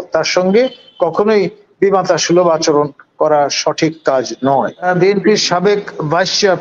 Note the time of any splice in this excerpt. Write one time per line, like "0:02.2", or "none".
0:04.8